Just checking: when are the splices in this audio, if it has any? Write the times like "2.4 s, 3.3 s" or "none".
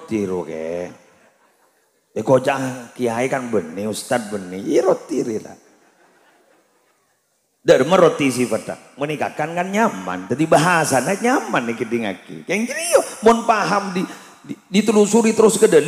none